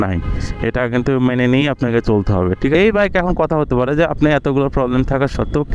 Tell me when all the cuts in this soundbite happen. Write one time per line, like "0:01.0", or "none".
0:02.7

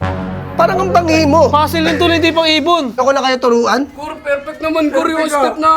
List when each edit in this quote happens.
0:03.0

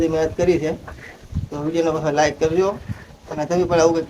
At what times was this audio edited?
none

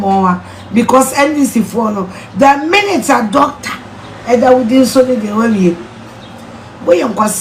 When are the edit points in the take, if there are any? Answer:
none

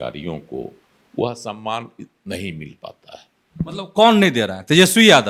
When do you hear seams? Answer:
none

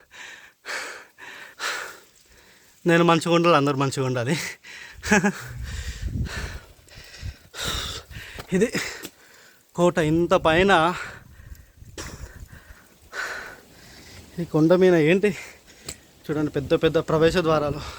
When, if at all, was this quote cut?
0:01.5

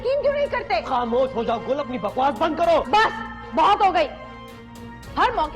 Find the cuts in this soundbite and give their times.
0:02.9

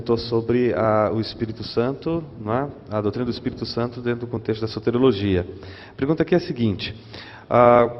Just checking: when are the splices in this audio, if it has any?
0:06.5

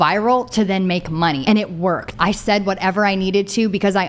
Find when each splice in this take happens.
0:01.8

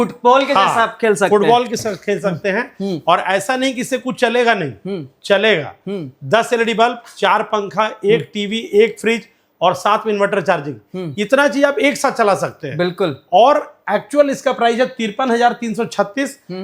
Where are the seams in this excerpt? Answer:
none

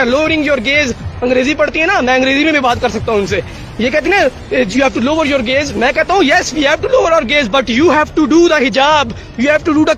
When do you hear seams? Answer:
none

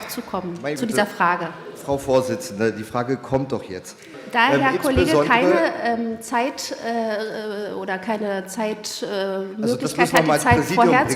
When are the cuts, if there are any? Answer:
0:04.1

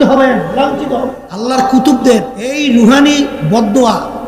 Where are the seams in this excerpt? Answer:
0:01.5
0:02.6

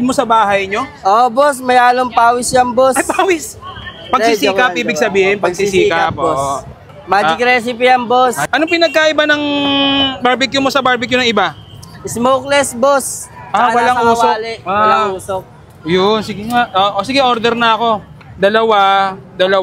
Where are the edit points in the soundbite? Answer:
none

